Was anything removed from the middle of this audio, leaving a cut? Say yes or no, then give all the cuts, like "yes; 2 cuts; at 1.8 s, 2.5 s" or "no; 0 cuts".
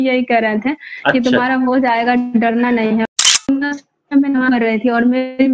yes; 1 cut; at 3.0 s